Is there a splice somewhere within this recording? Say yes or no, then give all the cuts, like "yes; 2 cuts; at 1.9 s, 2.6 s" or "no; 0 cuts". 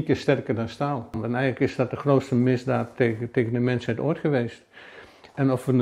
yes; 1 cut; at 1.2 s